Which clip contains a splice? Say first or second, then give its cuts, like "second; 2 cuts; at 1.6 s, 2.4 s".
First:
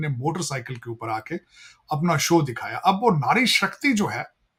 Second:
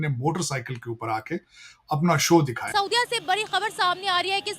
second; 1 cut; at 2.6 s